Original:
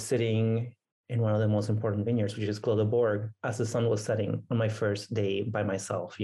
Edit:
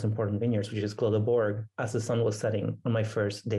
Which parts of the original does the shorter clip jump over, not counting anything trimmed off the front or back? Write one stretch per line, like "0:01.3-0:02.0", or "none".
none

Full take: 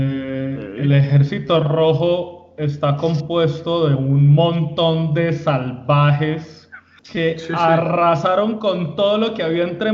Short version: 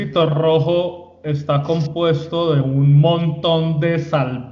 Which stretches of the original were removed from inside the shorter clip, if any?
none

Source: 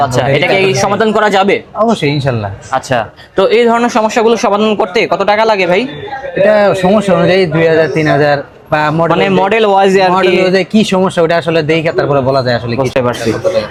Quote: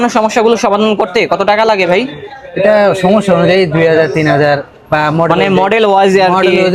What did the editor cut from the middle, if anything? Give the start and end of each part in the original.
none

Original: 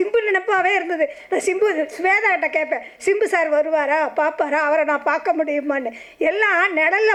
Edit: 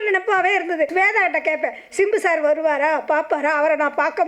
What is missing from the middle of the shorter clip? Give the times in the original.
0:01.1-0:02.0

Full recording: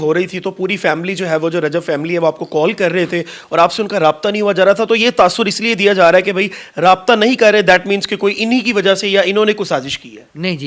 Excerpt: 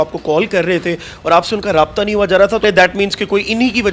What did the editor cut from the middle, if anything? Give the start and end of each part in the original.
0:04.9-0:07.5

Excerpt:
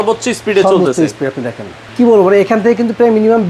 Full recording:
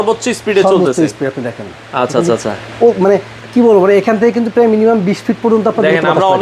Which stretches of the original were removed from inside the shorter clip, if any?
0:01.8-0:03.4

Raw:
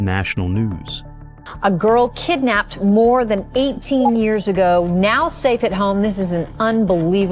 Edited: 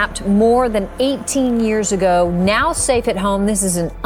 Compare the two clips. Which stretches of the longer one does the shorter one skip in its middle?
none

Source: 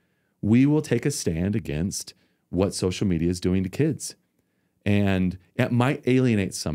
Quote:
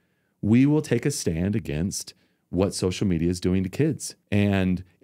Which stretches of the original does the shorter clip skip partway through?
0:04.1-0:04.7

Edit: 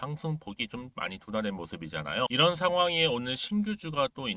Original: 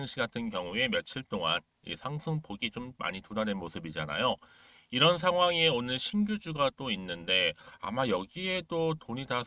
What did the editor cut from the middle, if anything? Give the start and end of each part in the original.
0:04.3-0:04.9

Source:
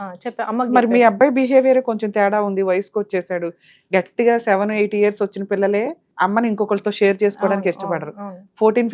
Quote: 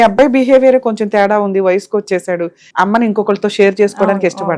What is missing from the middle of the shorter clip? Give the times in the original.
0:03.6-0:06.0

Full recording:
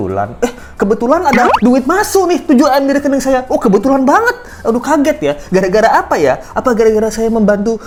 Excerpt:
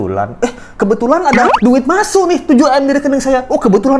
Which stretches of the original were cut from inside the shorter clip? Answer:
none

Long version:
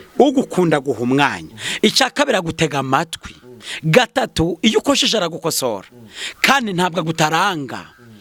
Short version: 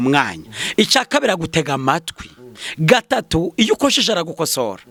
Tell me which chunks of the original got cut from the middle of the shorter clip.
none

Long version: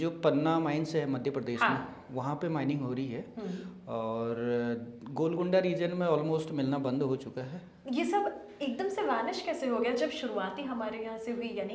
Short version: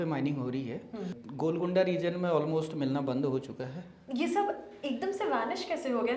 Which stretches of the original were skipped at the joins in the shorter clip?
0:03.6-0:05.0

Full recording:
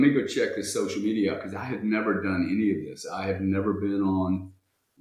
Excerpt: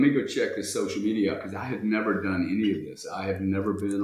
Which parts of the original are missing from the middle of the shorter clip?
none

